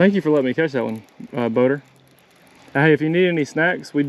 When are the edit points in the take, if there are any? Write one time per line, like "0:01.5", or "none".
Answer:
none